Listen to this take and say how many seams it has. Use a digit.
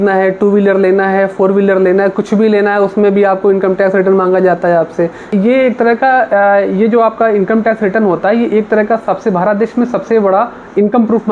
1